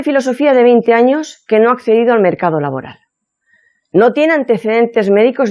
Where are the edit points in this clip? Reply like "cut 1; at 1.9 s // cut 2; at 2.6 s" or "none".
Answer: cut 1; at 4.3 s